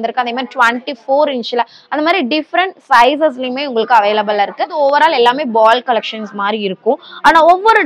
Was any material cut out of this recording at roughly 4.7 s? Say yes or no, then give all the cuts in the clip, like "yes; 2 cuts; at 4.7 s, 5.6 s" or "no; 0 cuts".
yes; 1 cut; at 4.7 s